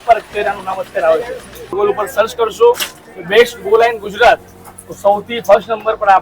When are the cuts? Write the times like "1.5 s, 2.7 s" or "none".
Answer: 1.8 s